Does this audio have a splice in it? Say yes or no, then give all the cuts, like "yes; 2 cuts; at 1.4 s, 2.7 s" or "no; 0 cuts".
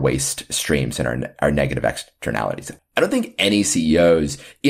yes; 1 cut; at 2.8 s